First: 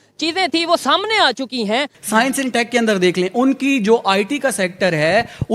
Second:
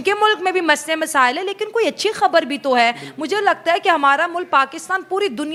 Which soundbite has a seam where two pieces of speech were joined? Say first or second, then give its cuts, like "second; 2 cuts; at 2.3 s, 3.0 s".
first; 1 cut; at 2.0 s